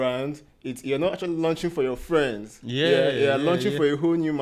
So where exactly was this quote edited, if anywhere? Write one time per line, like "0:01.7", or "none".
none